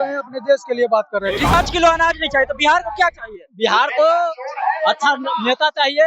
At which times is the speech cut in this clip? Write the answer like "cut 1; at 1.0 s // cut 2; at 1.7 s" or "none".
cut 1; at 1.5 s